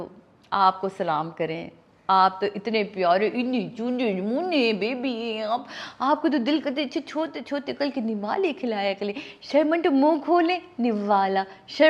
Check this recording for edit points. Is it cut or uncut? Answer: uncut